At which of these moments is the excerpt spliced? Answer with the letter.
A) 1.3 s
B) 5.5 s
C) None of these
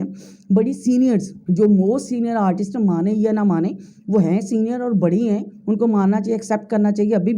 C